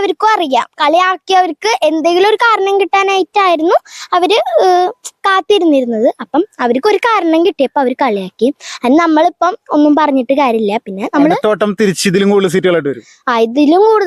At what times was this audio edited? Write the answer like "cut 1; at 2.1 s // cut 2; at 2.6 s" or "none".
none